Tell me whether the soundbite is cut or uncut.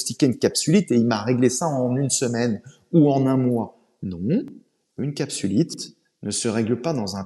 uncut